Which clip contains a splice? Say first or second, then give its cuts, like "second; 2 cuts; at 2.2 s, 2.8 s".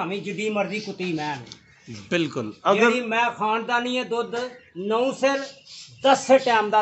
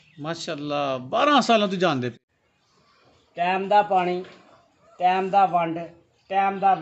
second; 1 cut; at 2.1 s